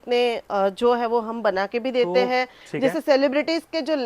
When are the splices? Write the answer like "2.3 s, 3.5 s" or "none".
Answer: 2.6 s

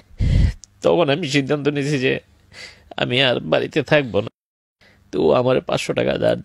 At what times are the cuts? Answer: 4.4 s

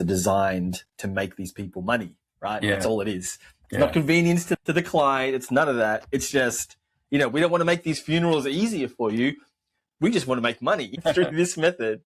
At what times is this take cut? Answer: 4.6 s, 11.1 s

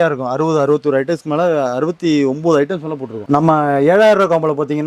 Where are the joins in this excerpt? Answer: 3.1 s

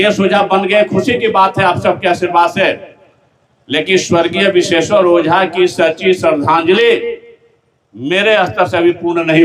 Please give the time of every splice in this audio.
none

